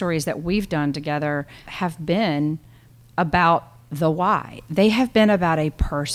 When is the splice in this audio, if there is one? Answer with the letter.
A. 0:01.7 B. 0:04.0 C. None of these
A